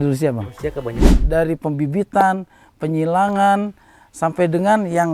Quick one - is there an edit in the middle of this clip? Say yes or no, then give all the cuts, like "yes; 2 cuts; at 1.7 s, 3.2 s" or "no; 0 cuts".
yes; 1 cut; at 1.2 s